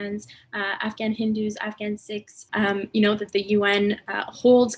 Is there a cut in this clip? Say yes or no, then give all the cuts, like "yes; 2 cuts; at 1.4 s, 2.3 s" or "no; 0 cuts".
yes; 1 cut; at 2.4 s